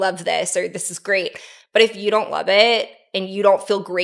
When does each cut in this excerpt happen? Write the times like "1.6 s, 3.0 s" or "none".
none